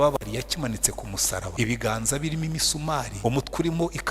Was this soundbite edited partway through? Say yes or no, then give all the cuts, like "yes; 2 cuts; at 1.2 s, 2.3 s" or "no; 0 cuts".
yes; 2 cuts; at 1.5 s, 3.1 s